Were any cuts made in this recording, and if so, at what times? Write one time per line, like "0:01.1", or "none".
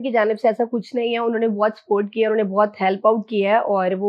none